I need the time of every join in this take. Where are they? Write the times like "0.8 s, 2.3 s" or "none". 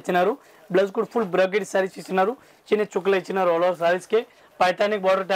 none

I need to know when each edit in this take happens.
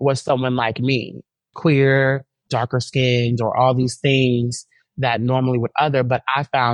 1.2 s, 2.4 s

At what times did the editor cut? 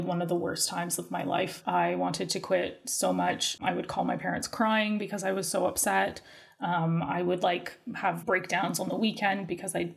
1.6 s, 3.6 s, 8.2 s

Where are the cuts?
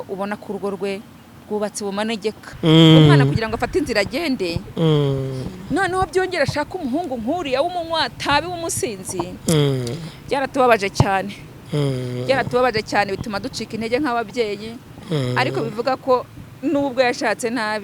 2.5 s

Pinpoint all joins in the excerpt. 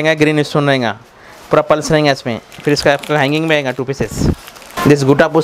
none

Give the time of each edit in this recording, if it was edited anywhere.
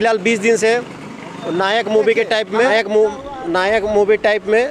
2.7 s

